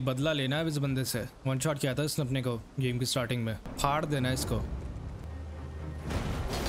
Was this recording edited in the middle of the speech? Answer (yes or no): yes